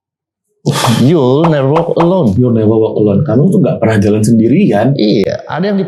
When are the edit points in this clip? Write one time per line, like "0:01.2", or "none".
none